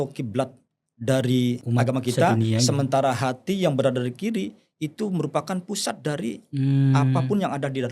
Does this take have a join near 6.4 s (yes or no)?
no